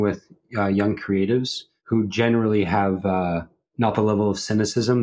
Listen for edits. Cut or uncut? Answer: uncut